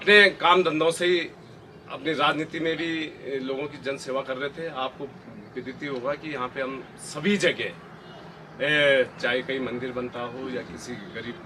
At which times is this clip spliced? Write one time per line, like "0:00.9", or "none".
none